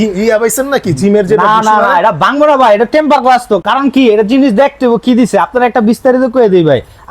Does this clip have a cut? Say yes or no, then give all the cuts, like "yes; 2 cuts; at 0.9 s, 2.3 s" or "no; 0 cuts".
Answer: no; 0 cuts